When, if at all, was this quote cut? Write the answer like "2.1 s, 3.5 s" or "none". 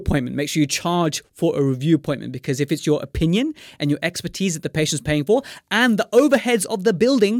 none